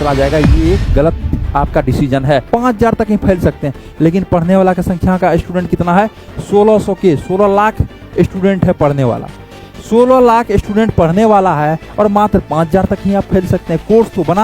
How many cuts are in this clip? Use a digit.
1